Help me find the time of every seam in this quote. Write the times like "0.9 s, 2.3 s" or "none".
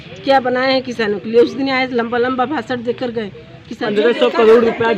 3.8 s